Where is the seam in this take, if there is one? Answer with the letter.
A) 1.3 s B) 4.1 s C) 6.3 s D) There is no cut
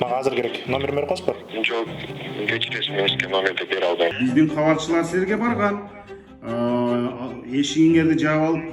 B